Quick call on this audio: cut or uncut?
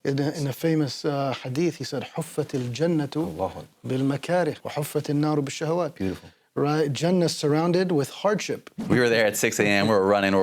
cut